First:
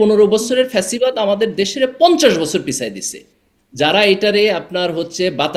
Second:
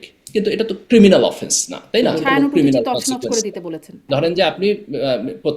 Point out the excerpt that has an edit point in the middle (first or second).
second